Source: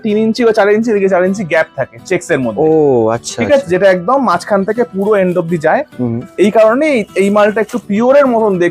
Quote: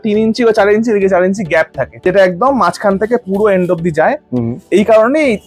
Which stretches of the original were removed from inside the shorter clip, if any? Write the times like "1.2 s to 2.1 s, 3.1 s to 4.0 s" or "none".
2.0 s to 3.7 s